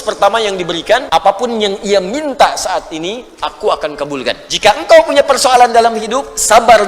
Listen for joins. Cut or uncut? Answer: cut